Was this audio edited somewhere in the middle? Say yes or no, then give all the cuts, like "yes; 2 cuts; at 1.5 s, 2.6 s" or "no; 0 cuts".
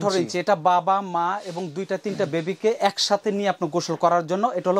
no; 0 cuts